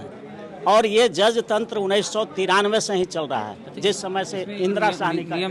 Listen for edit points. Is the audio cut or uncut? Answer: uncut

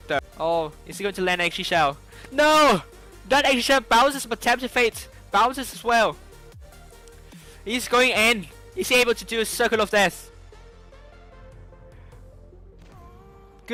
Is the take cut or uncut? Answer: uncut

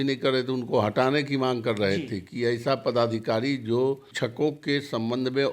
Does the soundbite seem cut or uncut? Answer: cut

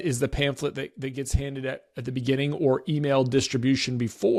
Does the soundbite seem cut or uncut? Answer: uncut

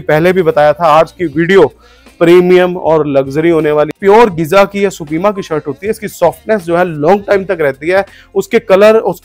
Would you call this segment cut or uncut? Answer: cut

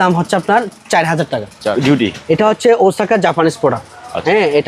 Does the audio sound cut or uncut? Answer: cut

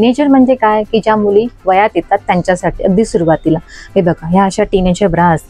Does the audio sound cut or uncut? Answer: uncut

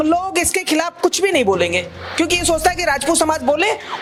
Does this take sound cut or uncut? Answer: uncut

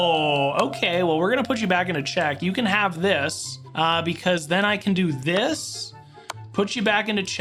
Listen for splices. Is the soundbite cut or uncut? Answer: uncut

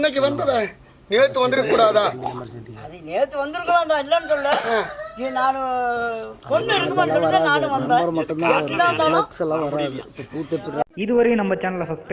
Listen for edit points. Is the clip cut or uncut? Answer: cut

